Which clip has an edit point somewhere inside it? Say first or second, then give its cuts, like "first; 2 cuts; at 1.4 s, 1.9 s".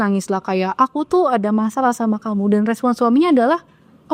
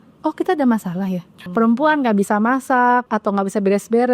second; 2 cuts; at 1.4 s, 3.1 s